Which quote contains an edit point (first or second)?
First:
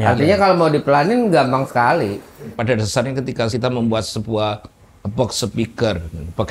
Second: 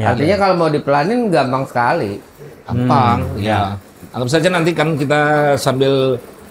first